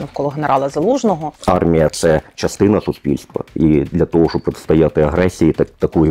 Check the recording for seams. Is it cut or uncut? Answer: cut